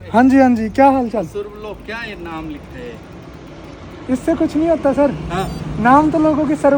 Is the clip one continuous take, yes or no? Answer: yes